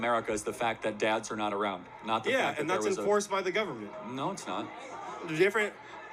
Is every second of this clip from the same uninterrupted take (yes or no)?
yes